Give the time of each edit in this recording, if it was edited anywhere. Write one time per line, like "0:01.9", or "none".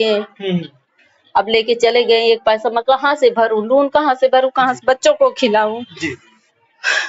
none